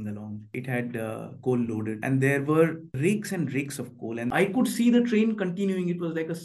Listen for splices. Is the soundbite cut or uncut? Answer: cut